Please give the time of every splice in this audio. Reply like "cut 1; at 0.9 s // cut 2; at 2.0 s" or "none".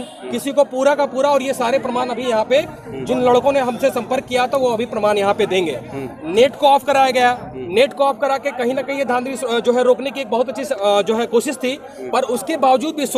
none